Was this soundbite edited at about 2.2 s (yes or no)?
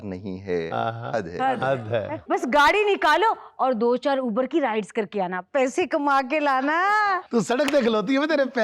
yes